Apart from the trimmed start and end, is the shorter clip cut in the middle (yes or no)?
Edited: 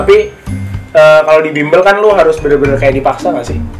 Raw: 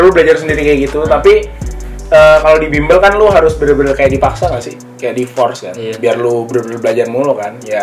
no